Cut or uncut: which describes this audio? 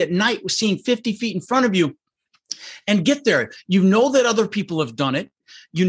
uncut